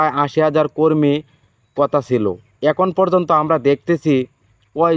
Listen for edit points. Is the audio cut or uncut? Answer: uncut